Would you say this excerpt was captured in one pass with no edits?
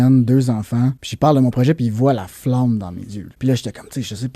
no; 2 cuts; at 1.0 s, 3.2 s

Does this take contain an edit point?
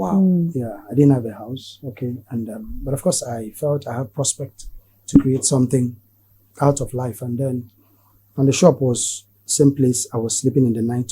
no; 0 cuts

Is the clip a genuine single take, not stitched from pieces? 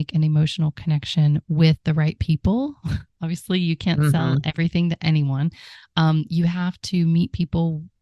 yes; 0 cuts

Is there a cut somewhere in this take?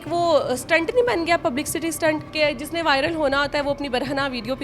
yes; 1 cut; at 2.3 s

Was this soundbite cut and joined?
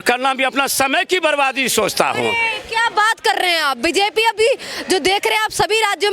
no; 0 cuts

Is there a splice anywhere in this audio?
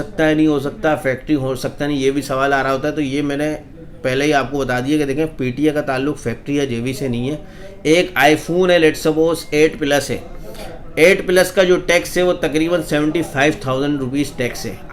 no; 0 cuts

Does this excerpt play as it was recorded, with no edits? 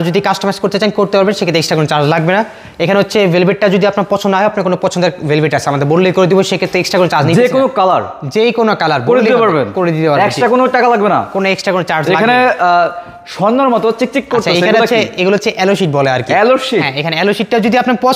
yes; 0 cuts

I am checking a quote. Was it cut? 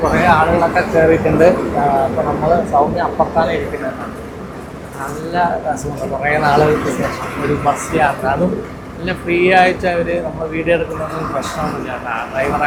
no; 0 cuts

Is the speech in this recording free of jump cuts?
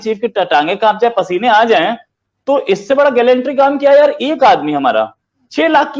yes; 0 cuts

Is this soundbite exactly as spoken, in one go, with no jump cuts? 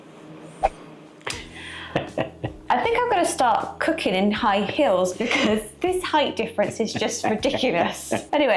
yes; 0 cuts

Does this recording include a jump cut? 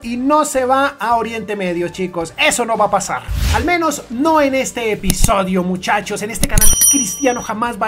no; 0 cuts

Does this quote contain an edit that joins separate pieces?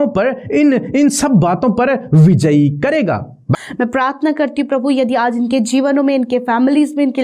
yes; 1 cut; at 3.5 s

